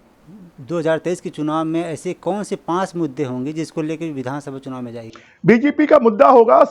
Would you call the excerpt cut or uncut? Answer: uncut